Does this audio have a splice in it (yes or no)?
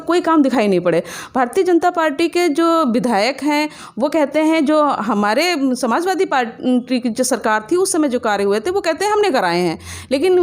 no